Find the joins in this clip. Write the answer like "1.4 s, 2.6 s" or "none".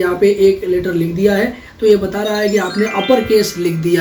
none